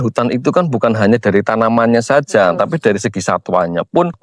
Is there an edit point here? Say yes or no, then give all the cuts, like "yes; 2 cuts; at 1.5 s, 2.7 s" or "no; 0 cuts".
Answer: no; 0 cuts